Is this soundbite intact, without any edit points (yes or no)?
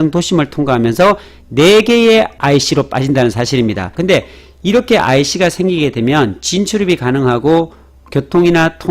no